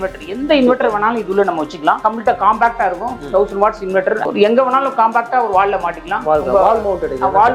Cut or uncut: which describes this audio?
cut